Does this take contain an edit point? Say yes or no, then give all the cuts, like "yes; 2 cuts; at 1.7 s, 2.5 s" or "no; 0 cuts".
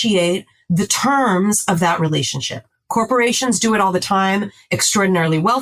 no; 0 cuts